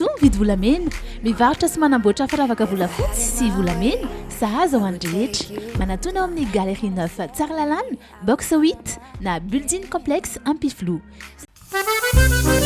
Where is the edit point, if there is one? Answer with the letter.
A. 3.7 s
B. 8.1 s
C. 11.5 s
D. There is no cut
D